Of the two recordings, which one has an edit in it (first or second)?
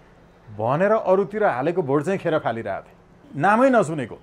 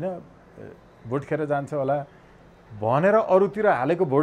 first